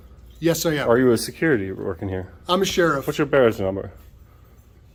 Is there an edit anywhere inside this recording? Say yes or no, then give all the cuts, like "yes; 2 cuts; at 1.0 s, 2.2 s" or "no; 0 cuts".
no; 0 cuts